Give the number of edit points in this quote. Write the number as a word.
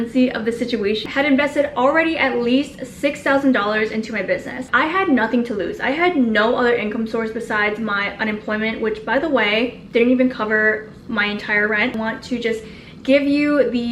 three